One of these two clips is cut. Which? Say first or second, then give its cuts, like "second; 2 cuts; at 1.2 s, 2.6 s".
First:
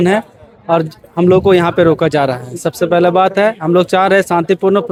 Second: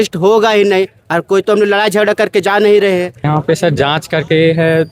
second; 1 cut; at 3.2 s